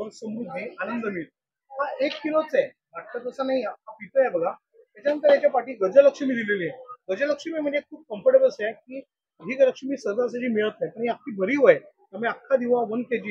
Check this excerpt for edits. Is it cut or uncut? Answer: uncut